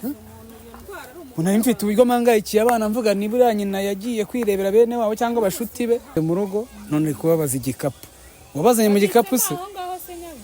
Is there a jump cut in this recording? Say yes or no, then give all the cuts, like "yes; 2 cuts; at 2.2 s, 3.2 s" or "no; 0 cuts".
yes; 1 cut; at 6.2 s